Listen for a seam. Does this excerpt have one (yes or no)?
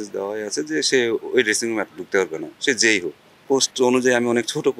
yes